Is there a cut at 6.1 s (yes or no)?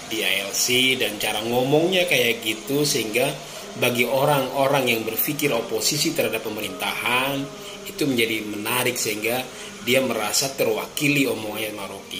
no